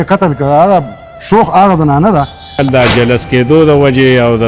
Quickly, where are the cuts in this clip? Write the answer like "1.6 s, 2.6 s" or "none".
2.6 s